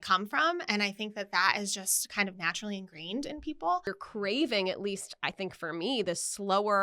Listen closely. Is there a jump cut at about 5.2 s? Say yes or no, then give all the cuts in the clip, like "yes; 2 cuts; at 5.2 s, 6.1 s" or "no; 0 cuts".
no; 1 cut; at 3.9 s